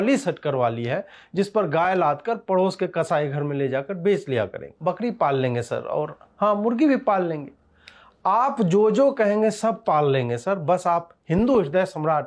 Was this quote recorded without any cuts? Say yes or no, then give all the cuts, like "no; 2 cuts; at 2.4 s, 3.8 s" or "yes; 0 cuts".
no; 1 cut; at 4.6 s